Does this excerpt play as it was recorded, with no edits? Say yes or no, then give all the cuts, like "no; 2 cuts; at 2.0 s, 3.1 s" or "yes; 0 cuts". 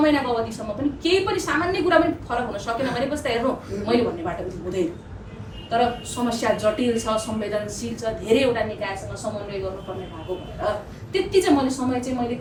yes; 0 cuts